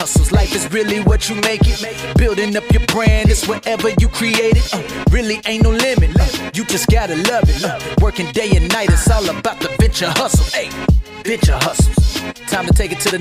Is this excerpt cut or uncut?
uncut